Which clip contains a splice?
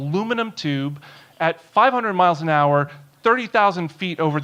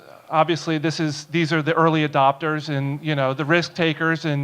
second; 1 cut; at 2.4 s

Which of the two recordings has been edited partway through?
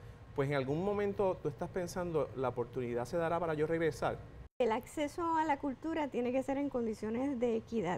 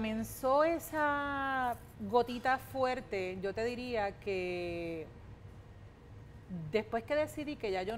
first; 1 cut; at 4.6 s

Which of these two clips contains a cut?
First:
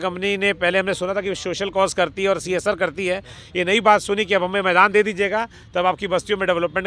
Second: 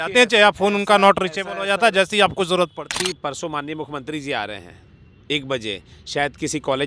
second; 1 cut; at 2.9 s

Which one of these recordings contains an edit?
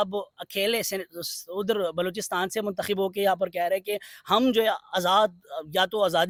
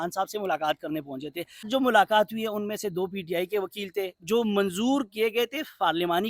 second; 1 cut; at 1.7 s

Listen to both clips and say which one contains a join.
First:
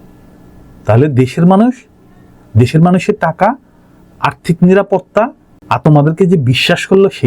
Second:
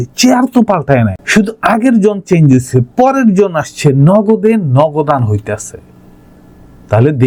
first; 1 cut; at 5.7 s

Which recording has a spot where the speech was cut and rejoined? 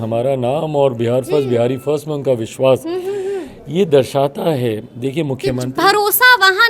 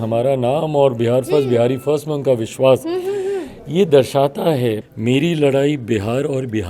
second; 1 cut; at 4.9 s

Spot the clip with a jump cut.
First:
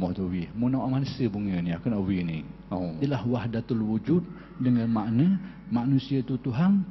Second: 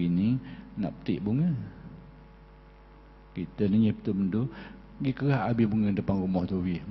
first; 1 cut; at 2.9 s

